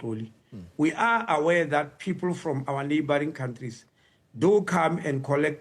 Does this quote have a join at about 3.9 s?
no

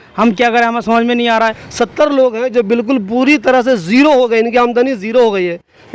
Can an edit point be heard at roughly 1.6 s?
yes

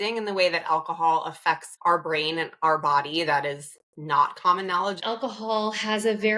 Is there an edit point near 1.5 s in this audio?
no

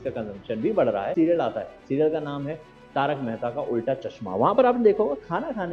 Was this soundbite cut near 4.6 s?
no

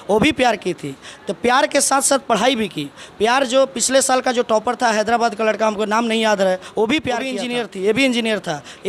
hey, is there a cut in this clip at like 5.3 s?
no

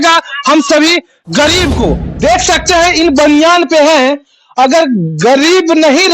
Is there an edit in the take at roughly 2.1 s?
yes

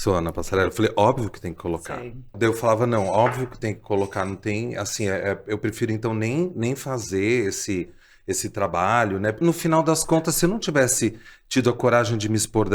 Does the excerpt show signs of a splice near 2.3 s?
yes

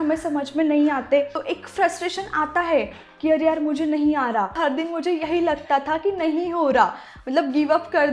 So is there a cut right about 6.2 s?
no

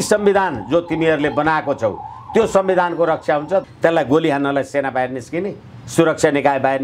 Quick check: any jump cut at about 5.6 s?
no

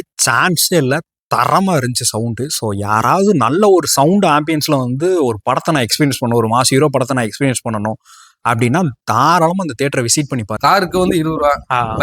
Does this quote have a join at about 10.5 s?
yes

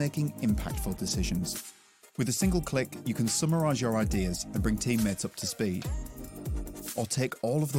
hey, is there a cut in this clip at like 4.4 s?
no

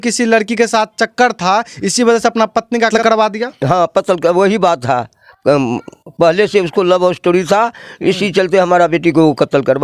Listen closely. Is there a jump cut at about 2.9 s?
yes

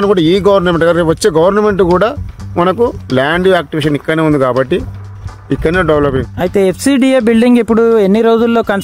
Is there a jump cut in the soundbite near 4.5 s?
no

